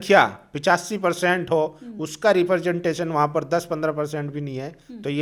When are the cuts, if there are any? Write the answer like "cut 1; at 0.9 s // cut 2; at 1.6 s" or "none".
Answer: none